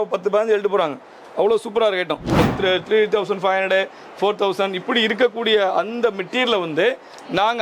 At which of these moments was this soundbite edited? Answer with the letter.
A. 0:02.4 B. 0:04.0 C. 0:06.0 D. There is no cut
A